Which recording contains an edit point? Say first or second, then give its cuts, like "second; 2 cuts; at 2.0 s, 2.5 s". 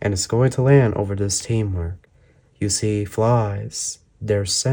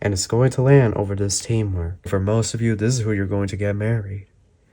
second; 1 cut; at 2.1 s